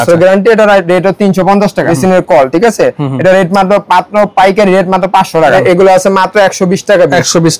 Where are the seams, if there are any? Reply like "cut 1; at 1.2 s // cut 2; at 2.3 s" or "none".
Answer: cut 1; at 1.9 s // cut 2; at 5.6 s